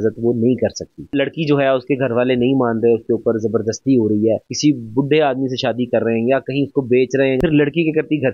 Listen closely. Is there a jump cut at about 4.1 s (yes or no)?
no